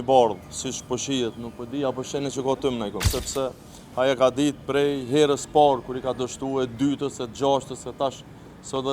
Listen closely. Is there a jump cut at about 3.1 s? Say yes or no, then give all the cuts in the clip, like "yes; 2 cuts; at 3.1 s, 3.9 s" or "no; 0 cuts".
yes; 1 cut; at 3.1 s